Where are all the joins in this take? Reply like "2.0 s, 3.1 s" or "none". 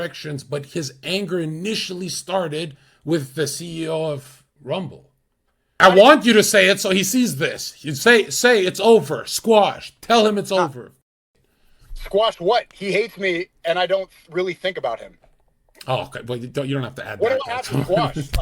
5.8 s